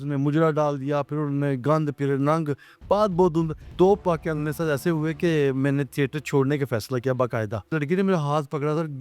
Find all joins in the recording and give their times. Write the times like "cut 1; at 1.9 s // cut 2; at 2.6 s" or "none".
cut 1; at 3.6 s // cut 2; at 7.7 s